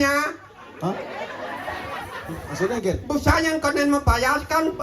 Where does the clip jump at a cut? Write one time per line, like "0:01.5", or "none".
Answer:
0:02.5